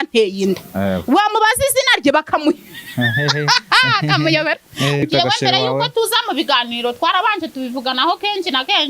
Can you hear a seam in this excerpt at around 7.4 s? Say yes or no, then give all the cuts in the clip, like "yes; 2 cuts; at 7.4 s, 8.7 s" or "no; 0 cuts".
no; 1 cut; at 5.0 s